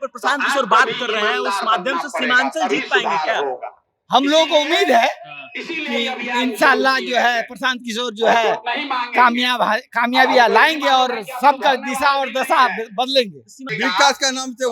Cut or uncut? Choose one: cut